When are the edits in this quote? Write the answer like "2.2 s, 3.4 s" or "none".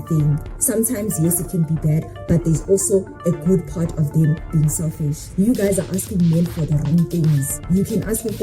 5.2 s, 7.5 s